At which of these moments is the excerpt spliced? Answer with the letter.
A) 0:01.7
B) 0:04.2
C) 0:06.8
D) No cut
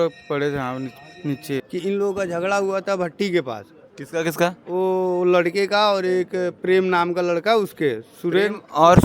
A